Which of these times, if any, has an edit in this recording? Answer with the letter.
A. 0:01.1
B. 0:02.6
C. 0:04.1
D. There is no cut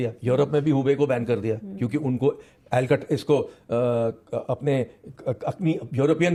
D